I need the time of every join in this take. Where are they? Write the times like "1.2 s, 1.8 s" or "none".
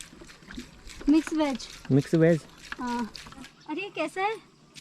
3.5 s